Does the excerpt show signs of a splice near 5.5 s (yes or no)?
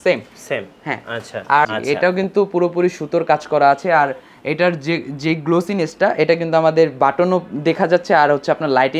no